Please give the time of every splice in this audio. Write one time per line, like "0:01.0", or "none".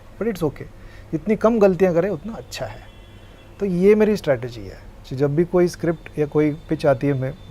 none